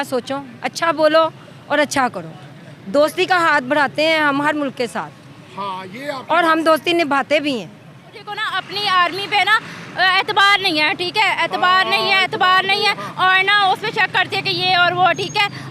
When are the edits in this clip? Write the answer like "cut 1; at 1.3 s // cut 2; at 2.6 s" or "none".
cut 1; at 8.5 s